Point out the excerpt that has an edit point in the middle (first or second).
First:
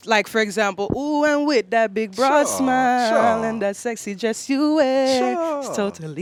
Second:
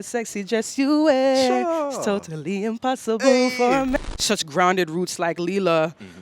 second